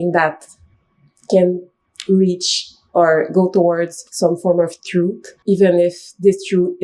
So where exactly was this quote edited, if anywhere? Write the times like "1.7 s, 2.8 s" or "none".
4.0 s, 5.3 s